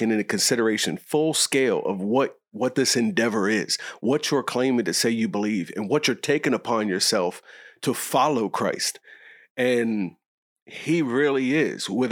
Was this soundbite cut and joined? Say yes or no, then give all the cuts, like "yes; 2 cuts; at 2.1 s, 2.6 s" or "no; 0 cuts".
no; 0 cuts